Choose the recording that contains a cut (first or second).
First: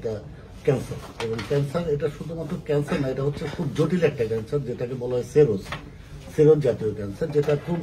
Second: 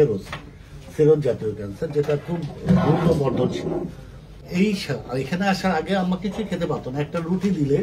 second